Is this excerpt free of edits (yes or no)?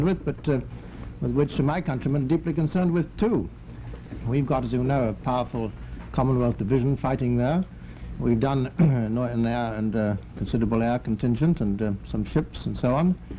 yes